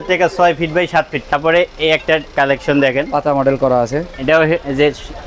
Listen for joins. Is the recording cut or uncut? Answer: uncut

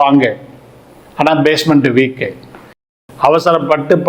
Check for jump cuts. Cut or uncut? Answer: cut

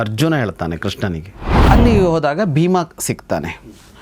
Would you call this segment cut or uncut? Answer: cut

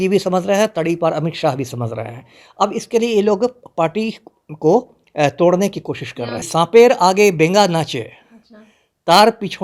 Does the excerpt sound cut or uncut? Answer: cut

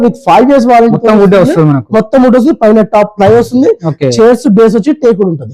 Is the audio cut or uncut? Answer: uncut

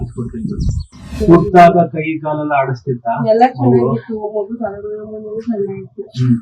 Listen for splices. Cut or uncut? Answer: cut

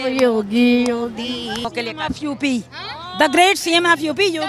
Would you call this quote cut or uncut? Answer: cut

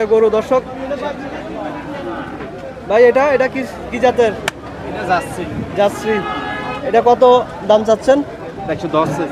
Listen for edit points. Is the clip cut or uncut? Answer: uncut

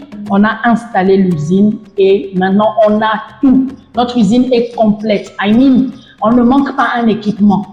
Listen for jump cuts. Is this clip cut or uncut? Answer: uncut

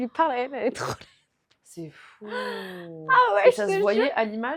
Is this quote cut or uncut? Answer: uncut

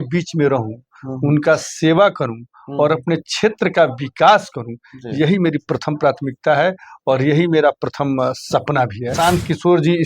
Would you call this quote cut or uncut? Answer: cut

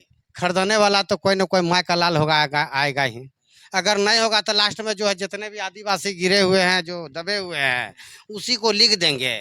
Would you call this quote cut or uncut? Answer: uncut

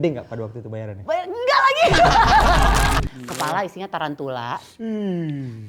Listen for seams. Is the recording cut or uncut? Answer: cut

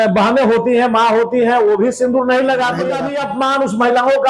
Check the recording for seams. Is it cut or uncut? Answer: cut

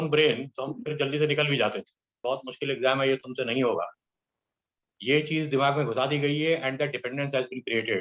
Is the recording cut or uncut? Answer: cut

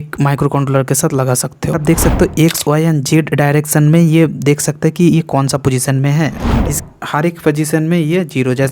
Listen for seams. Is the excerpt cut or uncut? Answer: cut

